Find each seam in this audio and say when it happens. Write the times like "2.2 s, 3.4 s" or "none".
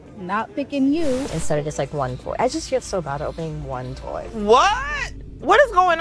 1.3 s